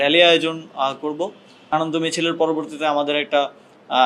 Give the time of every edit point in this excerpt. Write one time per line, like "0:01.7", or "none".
0:01.7